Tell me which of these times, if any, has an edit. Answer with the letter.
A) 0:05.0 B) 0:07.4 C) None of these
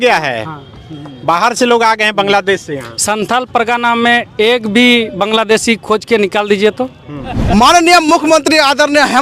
B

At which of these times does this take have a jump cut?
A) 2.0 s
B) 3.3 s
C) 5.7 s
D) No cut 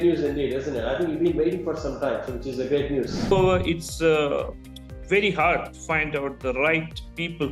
B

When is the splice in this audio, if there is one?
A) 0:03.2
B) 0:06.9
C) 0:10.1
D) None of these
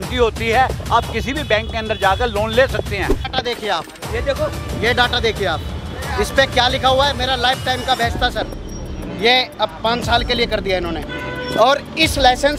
A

